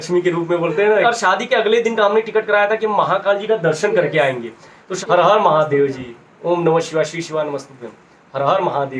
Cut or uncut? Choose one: cut